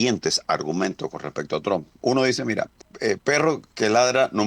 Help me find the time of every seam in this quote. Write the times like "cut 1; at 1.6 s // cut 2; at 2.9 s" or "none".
cut 1; at 2.8 s